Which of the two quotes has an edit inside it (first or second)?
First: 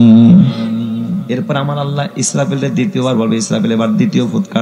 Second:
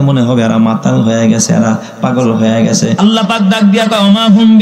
second